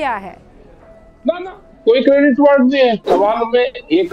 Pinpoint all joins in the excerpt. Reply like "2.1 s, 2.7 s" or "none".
3.0 s